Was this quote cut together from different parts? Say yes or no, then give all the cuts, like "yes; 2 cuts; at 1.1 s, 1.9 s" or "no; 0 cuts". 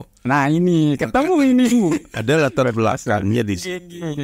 no; 0 cuts